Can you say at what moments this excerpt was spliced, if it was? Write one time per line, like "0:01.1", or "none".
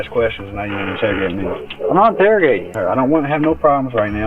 0:02.7